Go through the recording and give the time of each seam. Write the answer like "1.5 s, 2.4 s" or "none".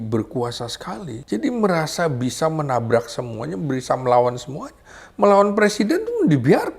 1.1 s